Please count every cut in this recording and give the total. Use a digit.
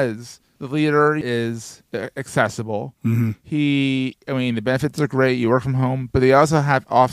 1